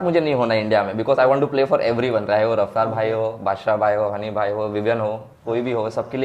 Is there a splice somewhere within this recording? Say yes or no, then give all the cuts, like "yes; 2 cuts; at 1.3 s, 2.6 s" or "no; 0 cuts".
no; 0 cuts